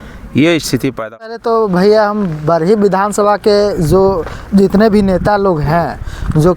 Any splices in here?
yes; 1 cut; at 1.3 s

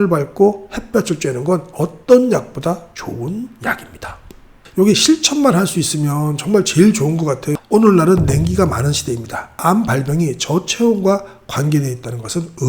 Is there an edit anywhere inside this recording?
yes; 1 cut; at 7.5 s

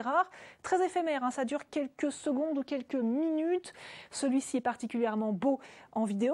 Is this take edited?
yes; 1 cut; at 0.9 s

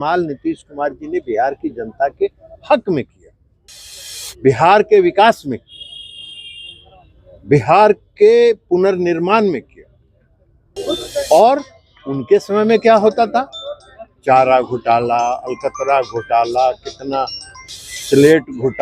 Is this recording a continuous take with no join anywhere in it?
no; 1 cut; at 10.7 s

